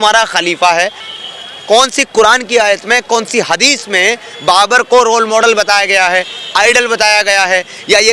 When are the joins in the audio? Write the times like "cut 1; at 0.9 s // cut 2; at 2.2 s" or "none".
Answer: cut 1; at 1.0 s